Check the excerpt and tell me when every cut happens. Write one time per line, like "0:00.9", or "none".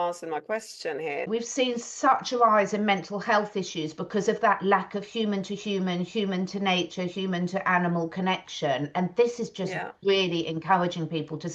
0:01.3